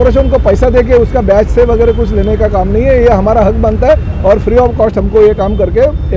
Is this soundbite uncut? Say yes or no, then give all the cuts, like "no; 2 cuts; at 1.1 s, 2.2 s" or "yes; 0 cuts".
yes; 0 cuts